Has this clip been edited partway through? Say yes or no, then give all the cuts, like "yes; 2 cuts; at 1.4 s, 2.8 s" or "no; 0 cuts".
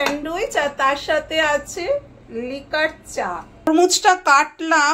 yes; 1 cut; at 3.7 s